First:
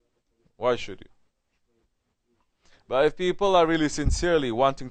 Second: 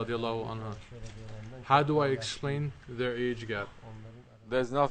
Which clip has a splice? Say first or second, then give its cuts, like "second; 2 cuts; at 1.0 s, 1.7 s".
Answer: second; 1 cut; at 2.8 s